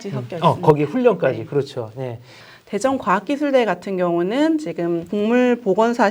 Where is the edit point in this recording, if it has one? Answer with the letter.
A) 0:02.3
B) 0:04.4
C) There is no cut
A